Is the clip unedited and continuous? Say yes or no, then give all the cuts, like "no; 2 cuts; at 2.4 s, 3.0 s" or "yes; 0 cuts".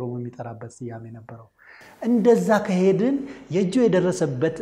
yes; 0 cuts